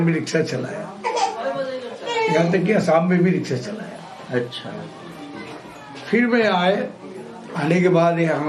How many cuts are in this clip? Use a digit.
0